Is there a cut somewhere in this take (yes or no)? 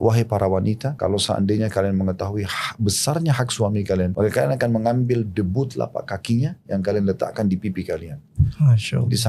yes